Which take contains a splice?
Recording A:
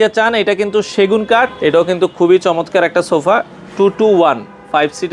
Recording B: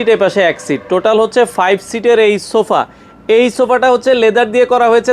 A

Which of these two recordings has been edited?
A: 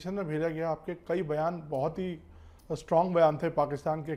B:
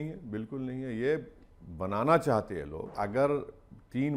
B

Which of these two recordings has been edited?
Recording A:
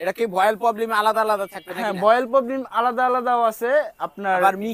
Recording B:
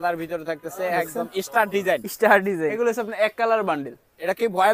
B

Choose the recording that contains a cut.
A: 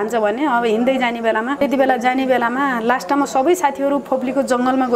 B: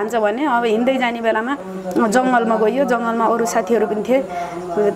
A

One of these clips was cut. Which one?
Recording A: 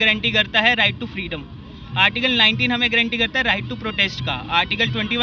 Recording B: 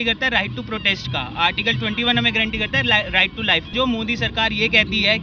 B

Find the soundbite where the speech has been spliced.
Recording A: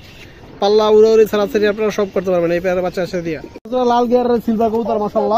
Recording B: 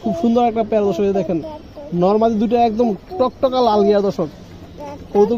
A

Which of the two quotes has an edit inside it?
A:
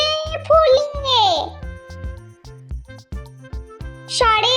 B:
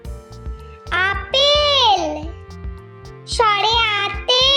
A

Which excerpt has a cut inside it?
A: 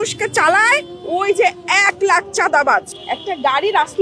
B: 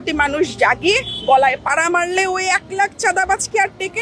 A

